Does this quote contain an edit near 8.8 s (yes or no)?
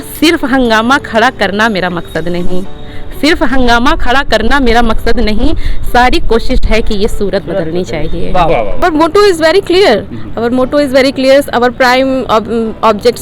yes